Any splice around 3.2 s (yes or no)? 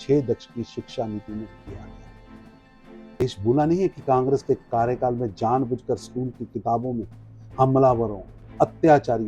yes